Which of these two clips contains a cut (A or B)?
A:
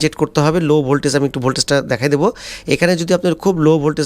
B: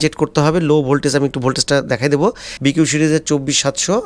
B